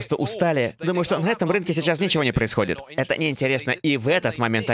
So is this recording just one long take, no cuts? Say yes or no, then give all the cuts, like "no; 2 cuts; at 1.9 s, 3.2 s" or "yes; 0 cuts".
yes; 0 cuts